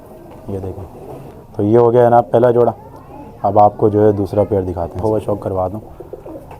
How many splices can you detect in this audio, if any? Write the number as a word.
two